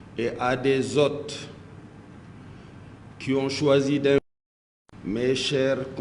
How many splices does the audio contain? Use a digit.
1